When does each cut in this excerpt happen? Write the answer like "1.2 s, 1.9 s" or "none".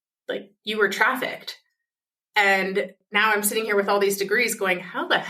3.0 s